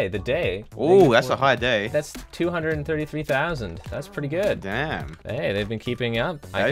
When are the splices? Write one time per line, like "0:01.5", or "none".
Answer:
none